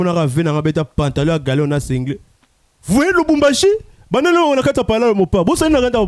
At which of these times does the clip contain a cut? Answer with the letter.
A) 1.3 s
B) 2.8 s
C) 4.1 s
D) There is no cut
D